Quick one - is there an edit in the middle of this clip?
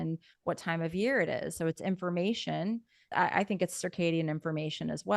yes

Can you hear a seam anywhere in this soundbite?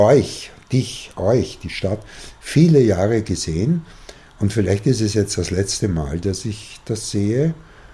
no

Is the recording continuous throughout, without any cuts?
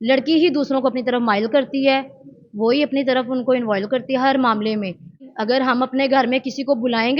no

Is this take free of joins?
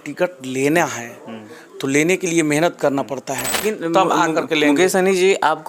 no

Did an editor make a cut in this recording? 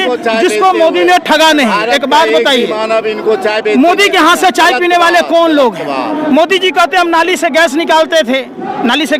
no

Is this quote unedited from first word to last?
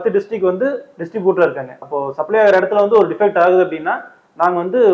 no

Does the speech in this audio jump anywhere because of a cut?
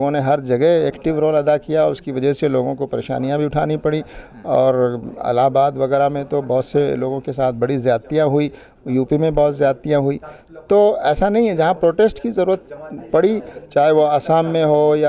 no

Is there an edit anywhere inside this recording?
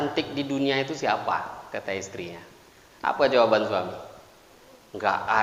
no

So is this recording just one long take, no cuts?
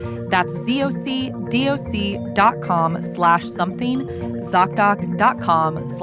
yes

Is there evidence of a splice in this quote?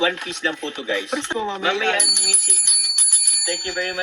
yes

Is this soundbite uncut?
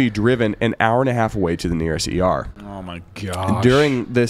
yes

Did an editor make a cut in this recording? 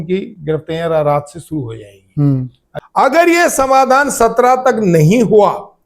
yes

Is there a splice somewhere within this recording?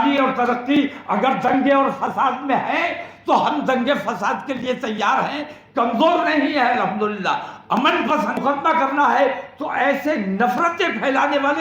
yes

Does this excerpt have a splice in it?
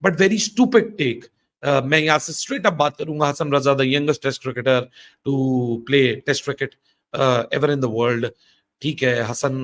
no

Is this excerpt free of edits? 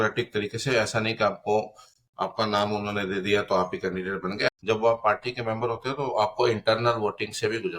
no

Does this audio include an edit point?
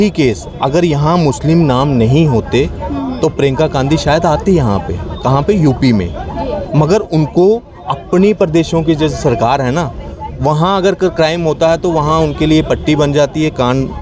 no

